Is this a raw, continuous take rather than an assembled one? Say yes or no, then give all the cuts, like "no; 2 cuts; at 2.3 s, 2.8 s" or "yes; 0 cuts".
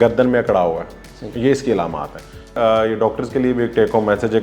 no; 1 cut; at 2.5 s